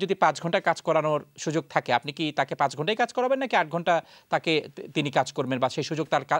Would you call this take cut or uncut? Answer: uncut